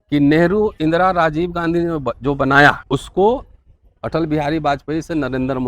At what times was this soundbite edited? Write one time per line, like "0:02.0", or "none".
0:02.8